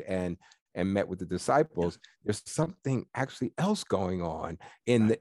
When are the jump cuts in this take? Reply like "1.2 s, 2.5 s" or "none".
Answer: none